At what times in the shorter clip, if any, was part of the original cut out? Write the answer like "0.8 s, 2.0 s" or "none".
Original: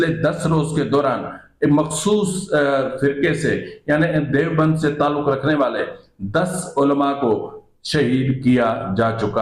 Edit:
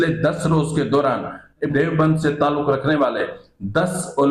1.7 s